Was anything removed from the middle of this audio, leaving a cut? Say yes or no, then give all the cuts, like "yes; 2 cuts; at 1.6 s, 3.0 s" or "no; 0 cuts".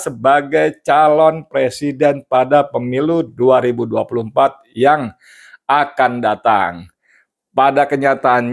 no; 0 cuts